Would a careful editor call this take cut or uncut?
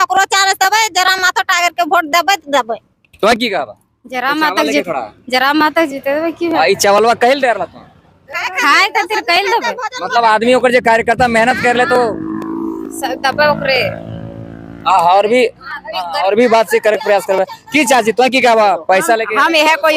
uncut